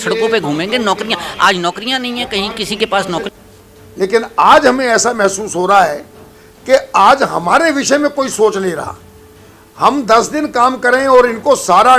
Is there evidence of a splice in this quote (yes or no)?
yes